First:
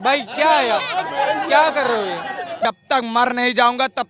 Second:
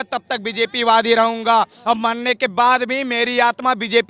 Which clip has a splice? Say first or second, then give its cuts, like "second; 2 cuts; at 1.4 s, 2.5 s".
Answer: first; 1 cut; at 2.7 s